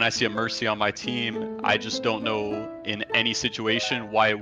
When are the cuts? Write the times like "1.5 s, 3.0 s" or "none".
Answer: none